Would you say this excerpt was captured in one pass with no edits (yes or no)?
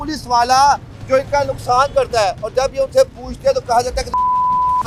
yes